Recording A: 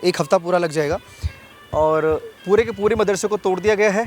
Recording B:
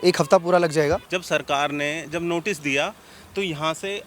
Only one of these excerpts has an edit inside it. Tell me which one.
B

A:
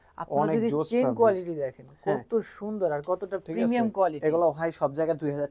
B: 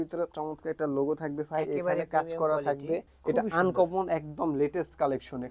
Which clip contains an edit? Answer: B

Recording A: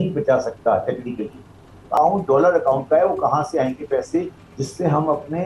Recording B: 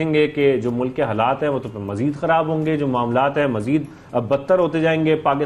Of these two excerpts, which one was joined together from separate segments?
A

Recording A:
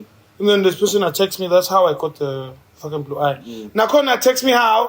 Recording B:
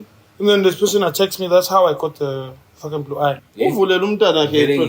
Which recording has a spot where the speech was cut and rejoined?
B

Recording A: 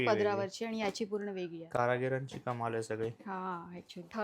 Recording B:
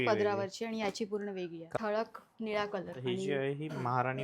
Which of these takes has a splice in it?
B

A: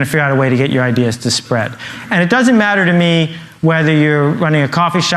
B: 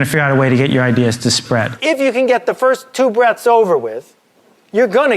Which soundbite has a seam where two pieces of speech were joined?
B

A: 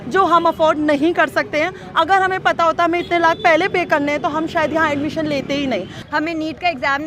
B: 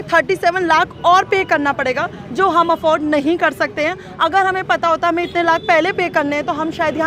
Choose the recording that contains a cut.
A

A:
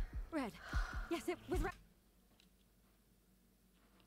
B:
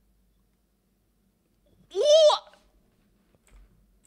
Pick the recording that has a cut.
A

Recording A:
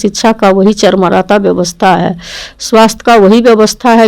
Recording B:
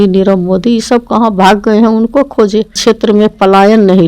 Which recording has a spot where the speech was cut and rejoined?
B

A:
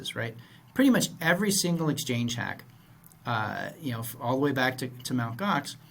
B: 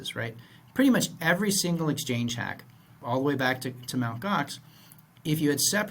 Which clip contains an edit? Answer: B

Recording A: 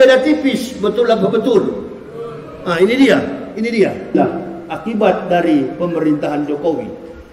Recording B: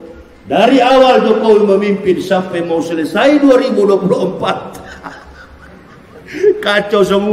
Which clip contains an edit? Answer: A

